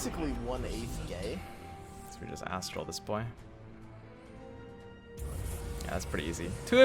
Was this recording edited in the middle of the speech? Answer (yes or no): yes